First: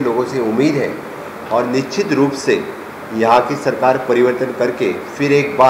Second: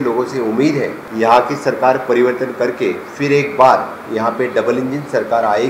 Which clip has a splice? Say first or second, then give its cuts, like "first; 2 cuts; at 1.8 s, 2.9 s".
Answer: second; 1 cut; at 1.0 s